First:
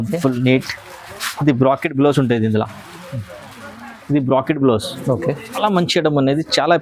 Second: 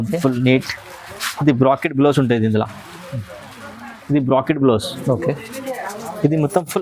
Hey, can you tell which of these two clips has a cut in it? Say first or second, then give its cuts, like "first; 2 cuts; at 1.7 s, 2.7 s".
first; 1 cut; at 5.6 s